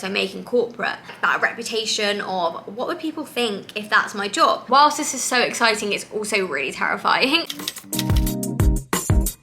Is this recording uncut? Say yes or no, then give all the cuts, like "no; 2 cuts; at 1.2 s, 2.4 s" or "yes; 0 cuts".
no; 3 cuts; at 1.1 s, 4.6 s, 7.5 s